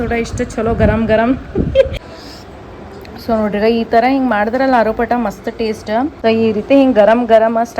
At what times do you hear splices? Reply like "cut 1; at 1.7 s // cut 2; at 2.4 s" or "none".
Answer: cut 1; at 1.9 s // cut 2; at 6.1 s